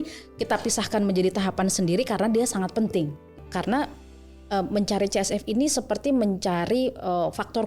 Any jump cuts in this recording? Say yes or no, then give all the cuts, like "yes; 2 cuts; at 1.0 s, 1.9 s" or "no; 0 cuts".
yes; 1 cut; at 3.4 s